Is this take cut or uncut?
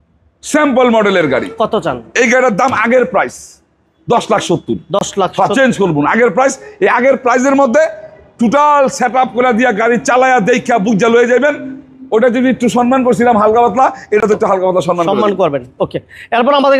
uncut